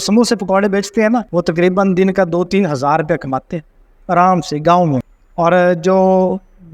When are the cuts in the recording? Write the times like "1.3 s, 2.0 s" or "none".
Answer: 1.3 s, 5.2 s